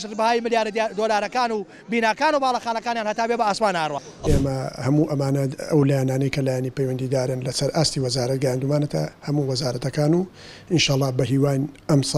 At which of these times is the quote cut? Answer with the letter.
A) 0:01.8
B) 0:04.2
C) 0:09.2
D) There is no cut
B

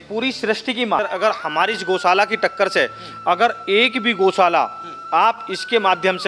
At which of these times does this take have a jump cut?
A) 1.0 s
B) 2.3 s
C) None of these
A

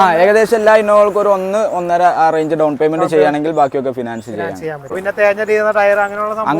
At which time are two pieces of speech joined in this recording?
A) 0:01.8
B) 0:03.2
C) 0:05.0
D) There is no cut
C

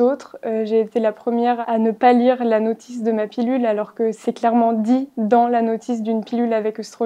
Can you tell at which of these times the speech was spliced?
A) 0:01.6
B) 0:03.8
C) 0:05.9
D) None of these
A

